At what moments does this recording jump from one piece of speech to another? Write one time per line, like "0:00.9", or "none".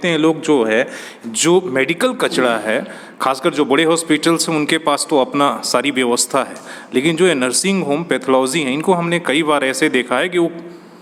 none